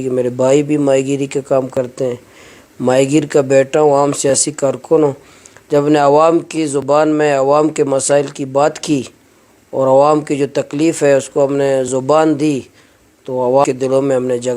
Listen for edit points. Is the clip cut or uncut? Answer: cut